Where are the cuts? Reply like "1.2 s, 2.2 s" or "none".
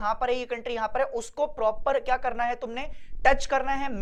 none